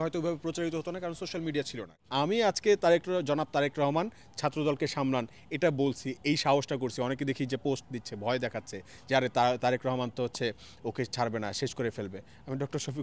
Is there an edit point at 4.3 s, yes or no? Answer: no